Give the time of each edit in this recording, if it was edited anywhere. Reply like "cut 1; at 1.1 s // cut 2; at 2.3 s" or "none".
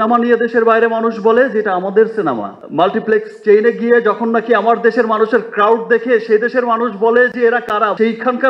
cut 1; at 2.6 s